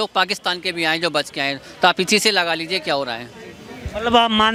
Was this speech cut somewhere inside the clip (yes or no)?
no